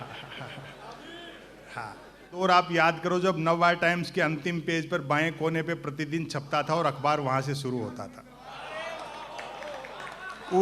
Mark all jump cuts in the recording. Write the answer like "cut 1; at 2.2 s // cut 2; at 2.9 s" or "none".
cut 1; at 2.4 s

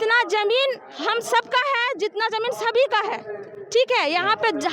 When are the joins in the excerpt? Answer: none

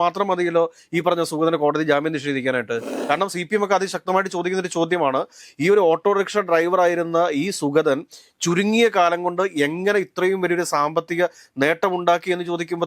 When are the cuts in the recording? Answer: cut 1; at 2.9 s

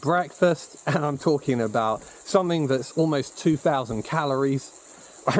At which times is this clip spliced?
none

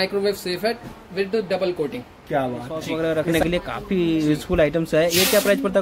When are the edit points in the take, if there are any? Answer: cut 1; at 2.8 s

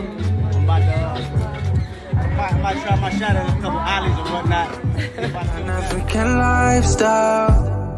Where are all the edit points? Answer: cut 1; at 5.5 s

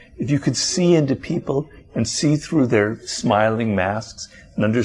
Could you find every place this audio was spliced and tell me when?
none

